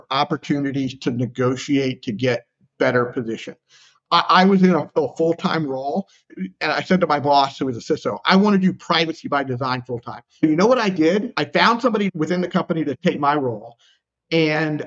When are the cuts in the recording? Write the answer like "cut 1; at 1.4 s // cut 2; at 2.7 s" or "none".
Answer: cut 1; at 10.3 s